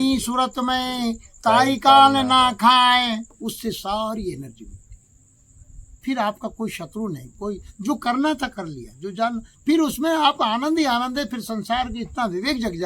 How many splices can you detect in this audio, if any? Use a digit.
1